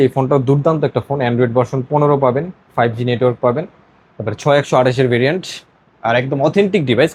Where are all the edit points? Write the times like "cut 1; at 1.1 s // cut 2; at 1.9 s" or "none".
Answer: none